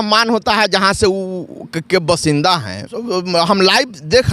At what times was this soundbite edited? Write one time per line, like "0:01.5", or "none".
0:03.0